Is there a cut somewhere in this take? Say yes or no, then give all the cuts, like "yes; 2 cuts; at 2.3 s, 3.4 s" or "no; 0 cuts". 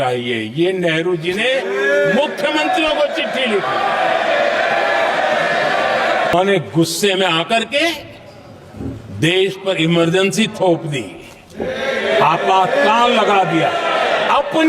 yes; 1 cut; at 6.3 s